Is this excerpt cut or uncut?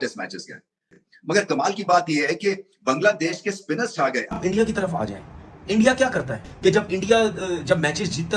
cut